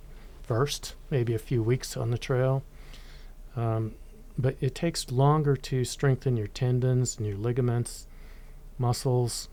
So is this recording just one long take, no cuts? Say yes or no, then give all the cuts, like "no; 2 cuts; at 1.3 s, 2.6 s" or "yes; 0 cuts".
yes; 0 cuts